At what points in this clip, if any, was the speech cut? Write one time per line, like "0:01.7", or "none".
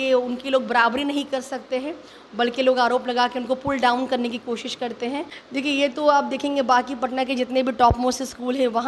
0:05.4